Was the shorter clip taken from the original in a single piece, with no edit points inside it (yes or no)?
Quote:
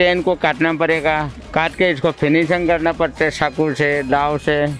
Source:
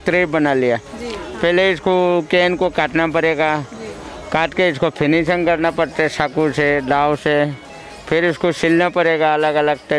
no